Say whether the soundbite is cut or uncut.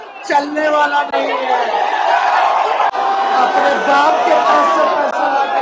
cut